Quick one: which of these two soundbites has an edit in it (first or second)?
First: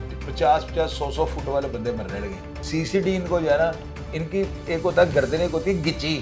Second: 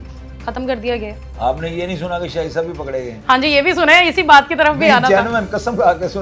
first